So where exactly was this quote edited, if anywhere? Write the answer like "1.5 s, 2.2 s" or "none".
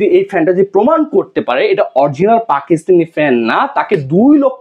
none